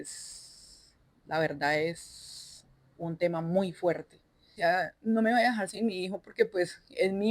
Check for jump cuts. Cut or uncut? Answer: cut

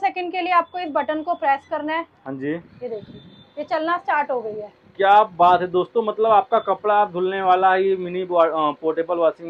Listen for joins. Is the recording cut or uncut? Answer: uncut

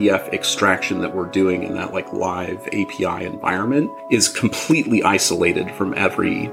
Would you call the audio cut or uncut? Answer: uncut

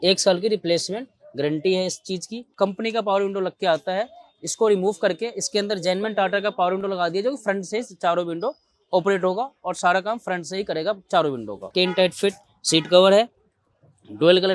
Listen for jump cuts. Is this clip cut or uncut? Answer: cut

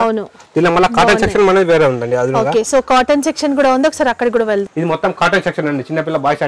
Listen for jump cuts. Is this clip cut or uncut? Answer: uncut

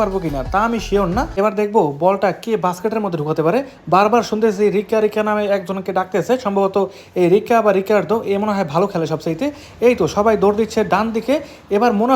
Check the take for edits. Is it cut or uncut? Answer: cut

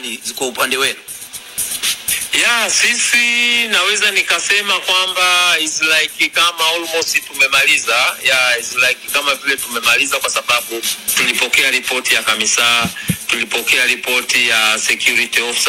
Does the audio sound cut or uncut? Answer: uncut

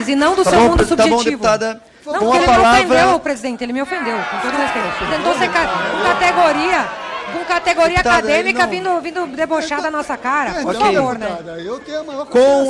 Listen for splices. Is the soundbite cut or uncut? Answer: uncut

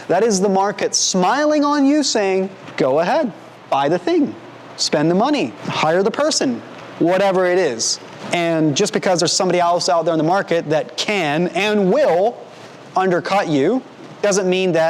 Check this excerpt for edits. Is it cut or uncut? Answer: cut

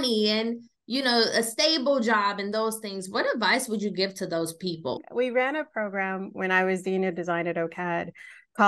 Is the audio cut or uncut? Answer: cut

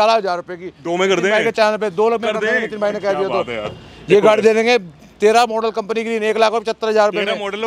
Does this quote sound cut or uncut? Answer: uncut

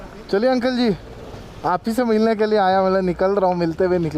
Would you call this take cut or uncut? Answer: uncut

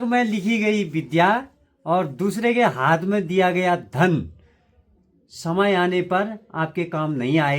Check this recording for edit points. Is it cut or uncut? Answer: uncut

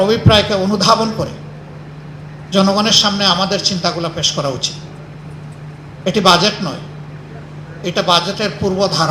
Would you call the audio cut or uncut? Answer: uncut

